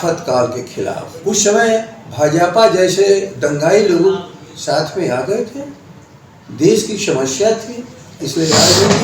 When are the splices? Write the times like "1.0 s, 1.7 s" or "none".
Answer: 1.1 s